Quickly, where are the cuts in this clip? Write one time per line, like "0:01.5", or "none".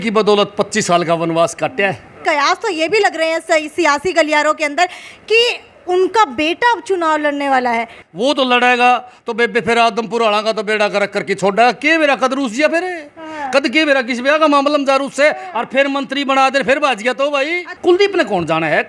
0:02.2
0:07.9
0:17.7